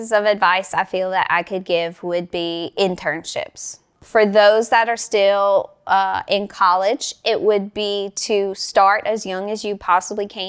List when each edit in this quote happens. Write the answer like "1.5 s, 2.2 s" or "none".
3.9 s